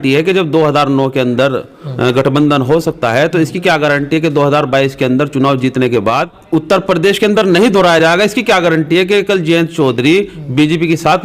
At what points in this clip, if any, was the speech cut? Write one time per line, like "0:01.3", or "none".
0:06.3

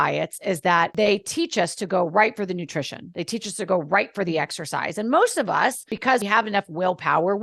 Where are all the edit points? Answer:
0:00.9
0:06.2

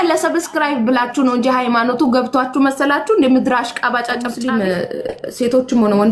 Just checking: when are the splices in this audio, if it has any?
0:04.2

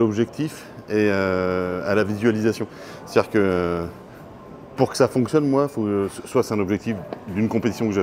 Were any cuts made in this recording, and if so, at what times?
none

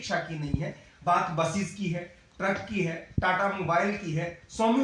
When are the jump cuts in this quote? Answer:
none

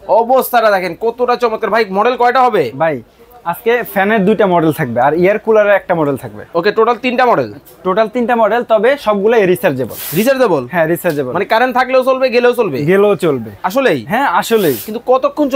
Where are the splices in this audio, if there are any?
none

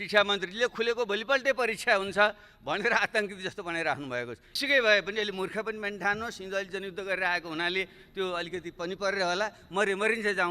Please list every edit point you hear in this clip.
0:04.5

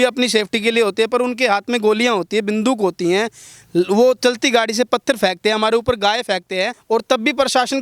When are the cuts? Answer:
0:06.8

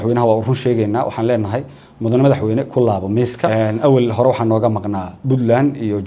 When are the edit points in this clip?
0:03.5

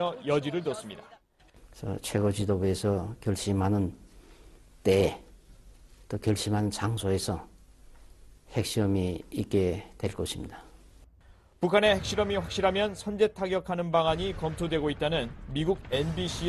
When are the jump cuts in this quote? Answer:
none

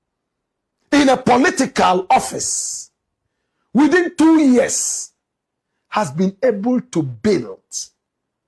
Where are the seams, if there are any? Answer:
none

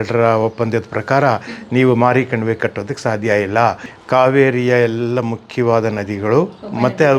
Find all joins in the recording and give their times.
0:03.9

